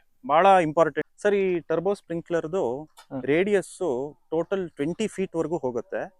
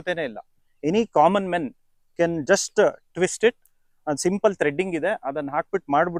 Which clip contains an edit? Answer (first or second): first